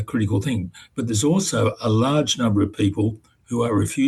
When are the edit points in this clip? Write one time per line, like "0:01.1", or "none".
none